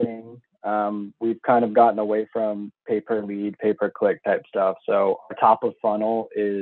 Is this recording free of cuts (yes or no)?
yes